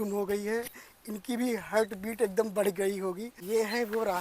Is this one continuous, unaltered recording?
no; 1 cut; at 3.3 s

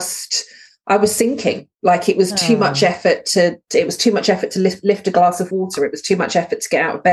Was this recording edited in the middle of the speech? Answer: no; 0 cuts

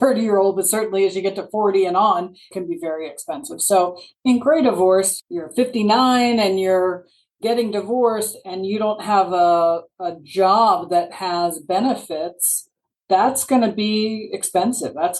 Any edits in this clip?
yes; 2 cuts; at 2.5 s, 5.2 s

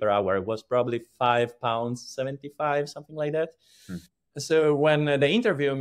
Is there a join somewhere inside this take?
yes; 1 cut; at 4.2 s

